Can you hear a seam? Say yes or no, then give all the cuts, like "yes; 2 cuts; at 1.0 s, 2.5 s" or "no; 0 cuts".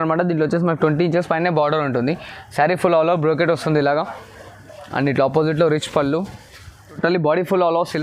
yes; 1 cut; at 7.0 s